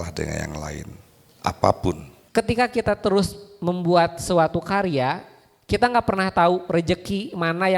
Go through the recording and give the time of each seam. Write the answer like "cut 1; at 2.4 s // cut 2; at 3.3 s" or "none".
cut 1; at 2.1 s